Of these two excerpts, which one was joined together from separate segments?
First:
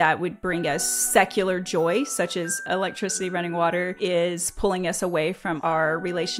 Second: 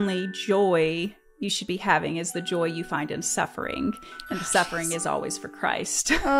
first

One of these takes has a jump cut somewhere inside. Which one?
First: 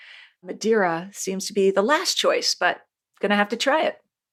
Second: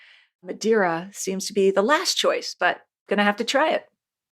second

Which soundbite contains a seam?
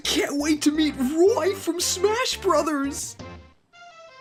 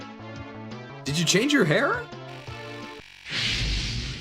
second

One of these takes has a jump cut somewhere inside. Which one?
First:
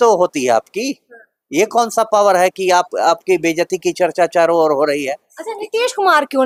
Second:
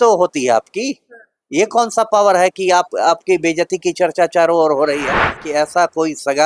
second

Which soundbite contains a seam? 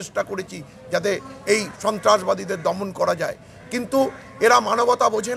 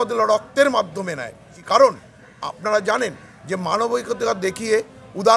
second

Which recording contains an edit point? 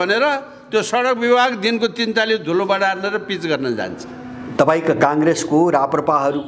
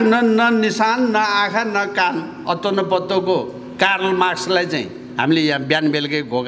first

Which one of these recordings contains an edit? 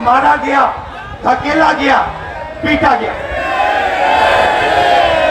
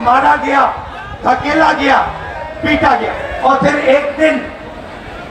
second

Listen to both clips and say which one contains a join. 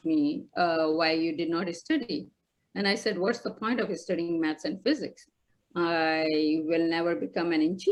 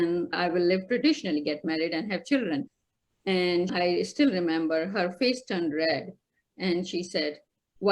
second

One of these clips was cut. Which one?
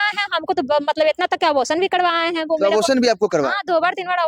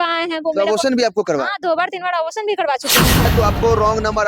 second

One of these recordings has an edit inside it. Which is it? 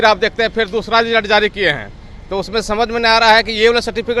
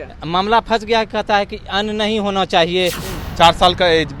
second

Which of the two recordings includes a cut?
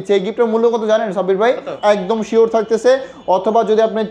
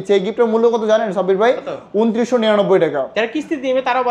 first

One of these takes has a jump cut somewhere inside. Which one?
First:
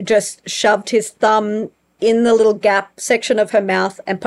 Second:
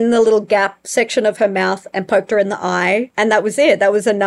second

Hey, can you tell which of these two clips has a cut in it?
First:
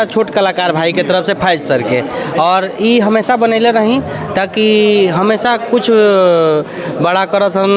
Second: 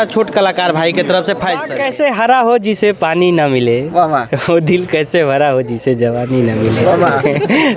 second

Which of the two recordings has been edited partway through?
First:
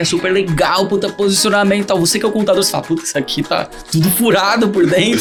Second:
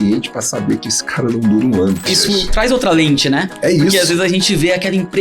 second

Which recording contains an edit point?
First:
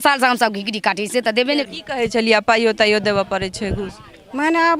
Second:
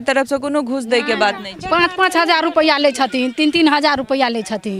first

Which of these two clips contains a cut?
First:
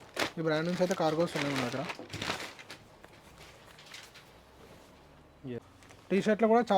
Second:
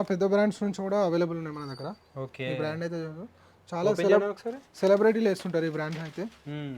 first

